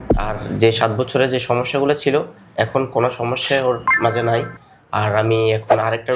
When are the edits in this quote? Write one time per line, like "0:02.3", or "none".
none